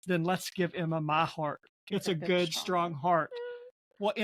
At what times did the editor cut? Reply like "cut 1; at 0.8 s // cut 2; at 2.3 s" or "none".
none

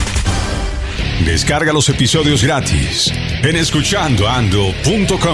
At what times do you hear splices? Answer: cut 1; at 1.1 s

